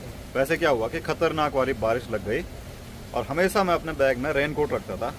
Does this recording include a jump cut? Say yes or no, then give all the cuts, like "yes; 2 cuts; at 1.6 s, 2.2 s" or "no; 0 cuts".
no; 0 cuts